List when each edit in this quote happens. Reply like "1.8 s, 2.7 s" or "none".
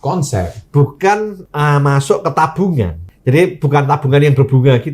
1.4 s, 3.1 s